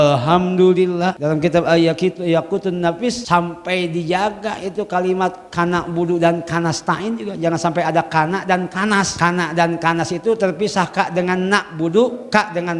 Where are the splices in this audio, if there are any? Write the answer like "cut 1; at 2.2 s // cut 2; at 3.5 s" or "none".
cut 1; at 1.2 s // cut 2; at 3.2 s // cut 3; at 9.1 s